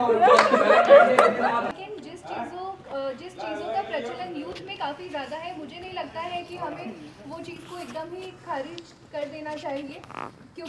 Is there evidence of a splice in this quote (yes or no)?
yes